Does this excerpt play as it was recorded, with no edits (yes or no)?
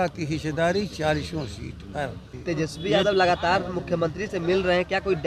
no